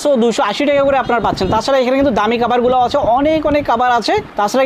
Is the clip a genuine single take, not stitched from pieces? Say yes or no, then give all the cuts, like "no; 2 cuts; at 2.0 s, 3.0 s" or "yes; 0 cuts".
yes; 0 cuts